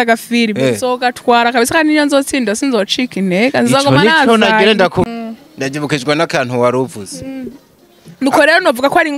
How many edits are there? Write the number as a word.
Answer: one